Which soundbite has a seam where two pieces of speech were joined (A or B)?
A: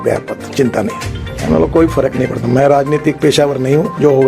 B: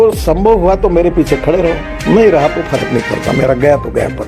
A